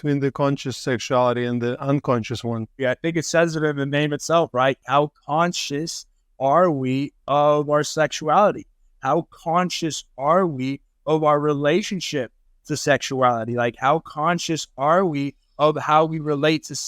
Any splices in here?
yes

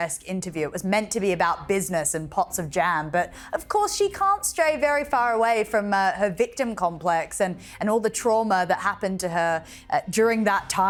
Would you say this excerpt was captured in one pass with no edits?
yes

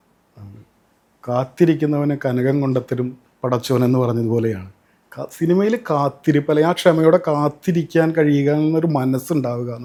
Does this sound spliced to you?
no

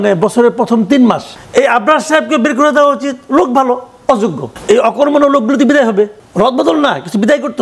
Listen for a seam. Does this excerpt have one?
yes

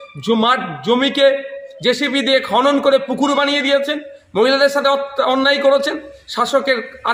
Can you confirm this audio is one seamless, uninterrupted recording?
yes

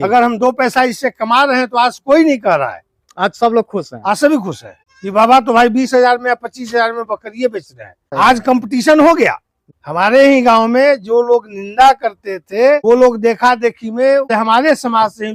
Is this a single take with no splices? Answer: yes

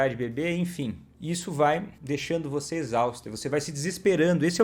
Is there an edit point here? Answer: yes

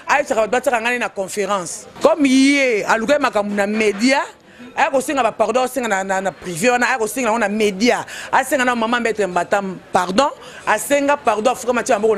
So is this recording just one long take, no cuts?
no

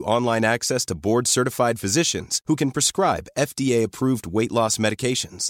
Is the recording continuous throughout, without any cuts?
yes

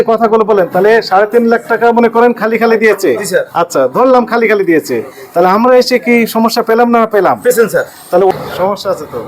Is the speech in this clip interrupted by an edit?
yes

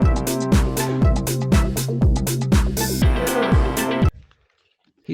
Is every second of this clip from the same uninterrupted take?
yes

